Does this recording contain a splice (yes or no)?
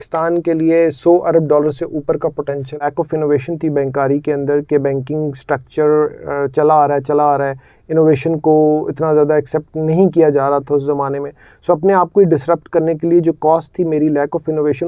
yes